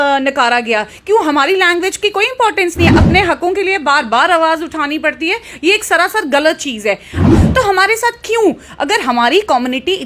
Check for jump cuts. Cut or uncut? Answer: cut